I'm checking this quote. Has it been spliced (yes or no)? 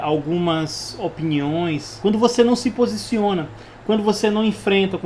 yes